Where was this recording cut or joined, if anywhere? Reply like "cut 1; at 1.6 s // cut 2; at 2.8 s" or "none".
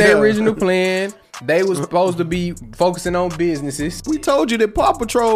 cut 1; at 4.0 s